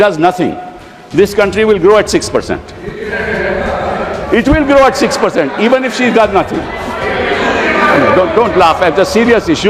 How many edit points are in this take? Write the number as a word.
zero